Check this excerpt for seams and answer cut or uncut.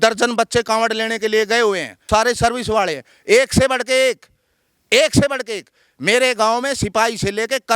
cut